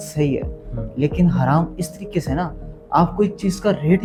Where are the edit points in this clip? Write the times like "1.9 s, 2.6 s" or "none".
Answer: none